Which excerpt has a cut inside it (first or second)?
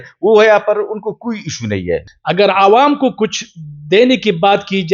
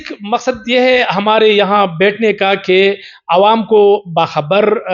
first